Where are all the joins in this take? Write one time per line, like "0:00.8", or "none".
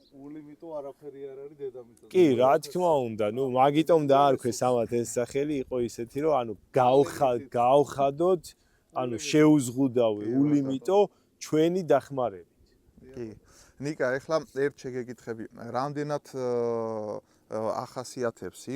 none